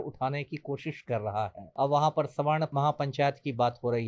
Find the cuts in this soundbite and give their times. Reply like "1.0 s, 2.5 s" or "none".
1.6 s, 2.7 s